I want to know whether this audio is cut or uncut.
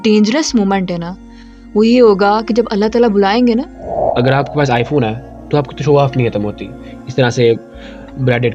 cut